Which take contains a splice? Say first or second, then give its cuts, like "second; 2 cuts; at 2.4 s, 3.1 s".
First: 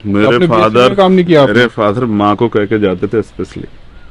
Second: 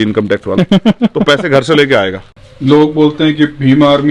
second; 1 cut; at 2.3 s